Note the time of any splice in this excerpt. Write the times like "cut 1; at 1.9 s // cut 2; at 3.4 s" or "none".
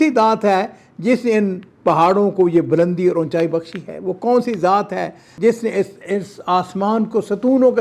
none